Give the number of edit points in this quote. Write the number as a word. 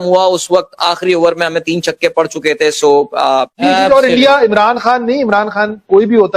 one